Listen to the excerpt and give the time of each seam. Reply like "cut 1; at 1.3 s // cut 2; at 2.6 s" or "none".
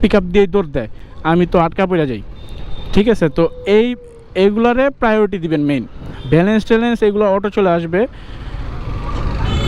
none